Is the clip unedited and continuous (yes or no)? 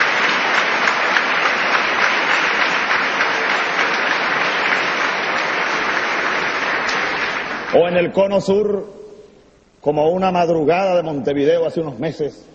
yes